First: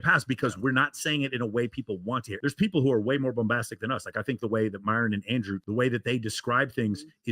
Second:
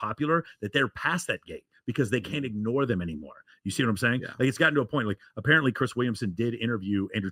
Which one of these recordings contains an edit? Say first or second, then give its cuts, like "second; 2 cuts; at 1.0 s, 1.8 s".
first; 1 cut; at 2.3 s